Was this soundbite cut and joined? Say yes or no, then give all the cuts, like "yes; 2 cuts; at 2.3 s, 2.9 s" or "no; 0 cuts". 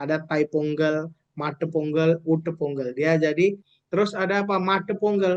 yes; 1 cut; at 3.7 s